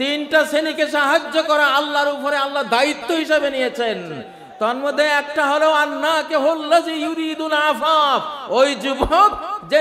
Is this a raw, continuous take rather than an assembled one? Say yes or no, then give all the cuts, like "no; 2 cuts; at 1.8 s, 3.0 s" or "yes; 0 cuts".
yes; 0 cuts